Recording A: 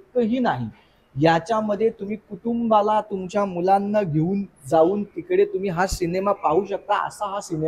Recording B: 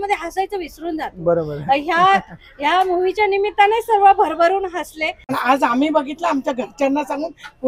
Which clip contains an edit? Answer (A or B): B